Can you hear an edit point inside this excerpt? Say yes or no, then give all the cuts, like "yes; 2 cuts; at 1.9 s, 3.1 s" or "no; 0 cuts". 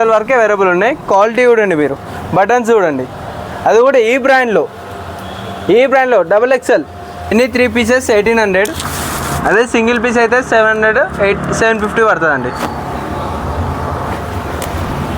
yes; 1 cut; at 7.3 s